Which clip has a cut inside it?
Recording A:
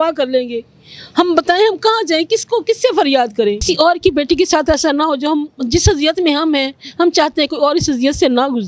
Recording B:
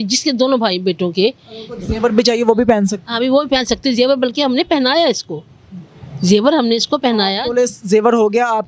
A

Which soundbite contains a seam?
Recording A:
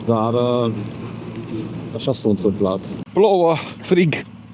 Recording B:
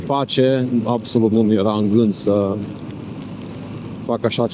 A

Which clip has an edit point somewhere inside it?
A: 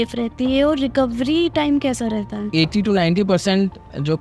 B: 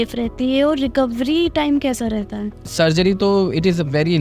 A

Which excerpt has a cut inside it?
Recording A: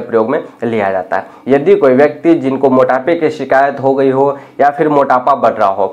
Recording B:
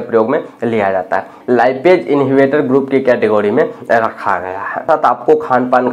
B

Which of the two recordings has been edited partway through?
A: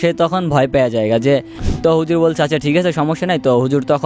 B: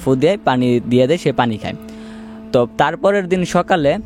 A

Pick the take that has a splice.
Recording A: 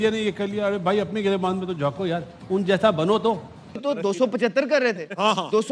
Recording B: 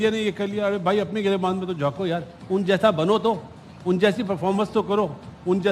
A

